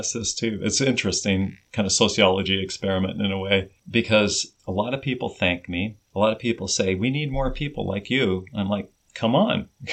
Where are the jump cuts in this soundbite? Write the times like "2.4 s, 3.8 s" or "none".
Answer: 1.6 s, 3.8 s, 4.5 s, 6.0 s, 9.0 s